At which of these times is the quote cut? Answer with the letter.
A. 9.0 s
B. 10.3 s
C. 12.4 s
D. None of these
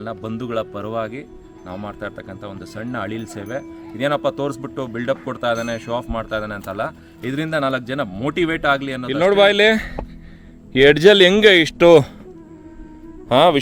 A